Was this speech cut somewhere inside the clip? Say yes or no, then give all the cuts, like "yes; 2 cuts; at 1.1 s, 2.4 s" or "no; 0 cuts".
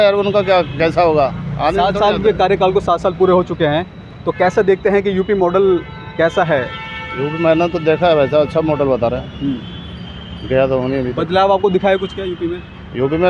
no; 0 cuts